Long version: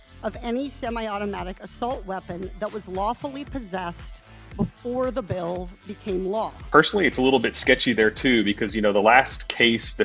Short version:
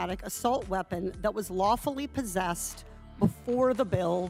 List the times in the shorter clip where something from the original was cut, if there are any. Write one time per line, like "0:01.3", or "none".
none